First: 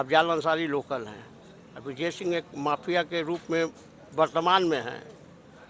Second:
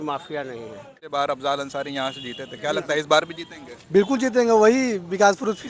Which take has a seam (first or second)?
second